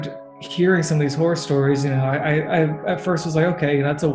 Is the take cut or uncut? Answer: uncut